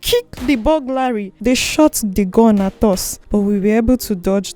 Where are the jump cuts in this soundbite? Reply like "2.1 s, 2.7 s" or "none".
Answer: 1.3 s, 3.1 s